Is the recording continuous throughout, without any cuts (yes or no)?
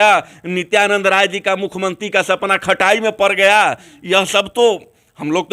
yes